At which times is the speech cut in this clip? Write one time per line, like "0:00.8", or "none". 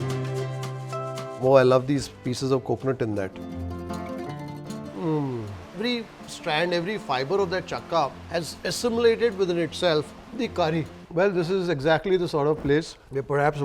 0:03.3
0:11.0

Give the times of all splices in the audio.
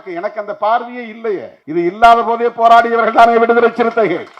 0:01.6

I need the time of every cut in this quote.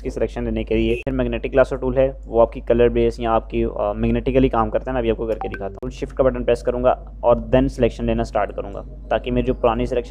0:01.1
0:05.8

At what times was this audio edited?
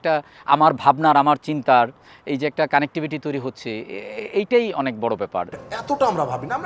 0:05.7

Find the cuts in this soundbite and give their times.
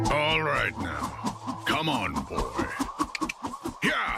none

